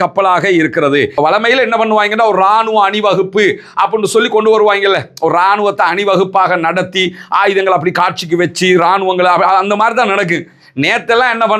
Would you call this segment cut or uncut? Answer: cut